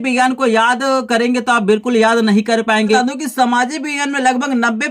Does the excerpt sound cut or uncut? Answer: cut